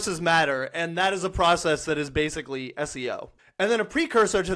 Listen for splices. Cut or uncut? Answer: cut